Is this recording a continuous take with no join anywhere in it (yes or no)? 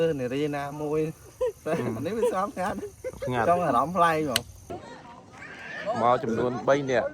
no